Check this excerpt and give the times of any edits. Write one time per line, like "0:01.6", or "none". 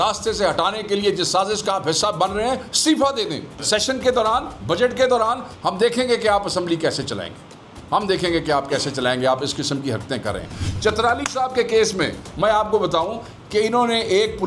0:03.6
0:10.6